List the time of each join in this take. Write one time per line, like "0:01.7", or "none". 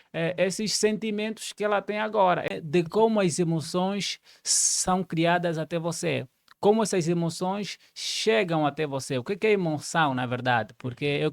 0:02.5